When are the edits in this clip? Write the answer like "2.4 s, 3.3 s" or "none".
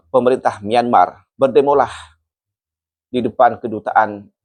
none